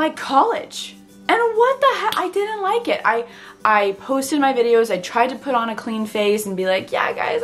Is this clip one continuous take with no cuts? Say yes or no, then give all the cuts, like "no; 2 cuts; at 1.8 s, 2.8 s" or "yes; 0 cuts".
yes; 0 cuts